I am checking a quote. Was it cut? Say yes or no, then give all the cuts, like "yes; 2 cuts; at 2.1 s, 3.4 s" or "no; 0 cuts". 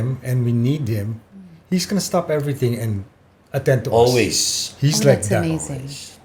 no; 0 cuts